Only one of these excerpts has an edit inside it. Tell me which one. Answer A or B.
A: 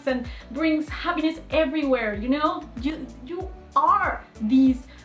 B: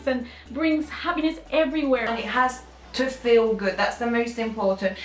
B